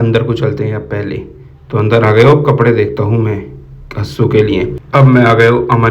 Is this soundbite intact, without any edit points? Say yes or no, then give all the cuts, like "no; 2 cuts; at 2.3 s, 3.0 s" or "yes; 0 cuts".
no; 1 cut; at 4.8 s